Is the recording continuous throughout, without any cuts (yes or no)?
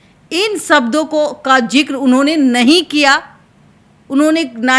yes